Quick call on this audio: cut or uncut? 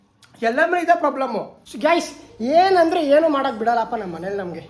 cut